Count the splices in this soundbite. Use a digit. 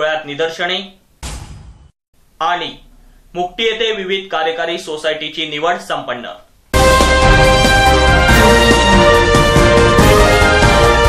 0